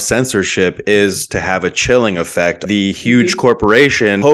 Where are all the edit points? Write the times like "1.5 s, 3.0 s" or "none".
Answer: 2.6 s

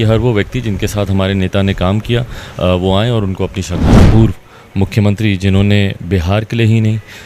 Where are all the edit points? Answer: 4.0 s

